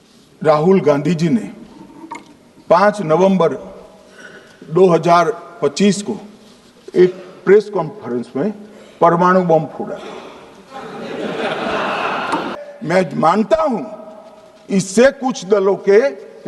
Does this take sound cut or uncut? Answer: cut